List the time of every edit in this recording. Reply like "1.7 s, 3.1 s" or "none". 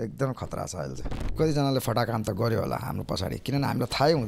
1.3 s